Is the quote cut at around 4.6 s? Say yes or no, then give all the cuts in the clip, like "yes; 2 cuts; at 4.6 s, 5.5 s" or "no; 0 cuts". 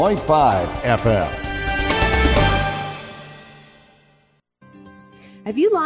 yes; 1 cut; at 4.6 s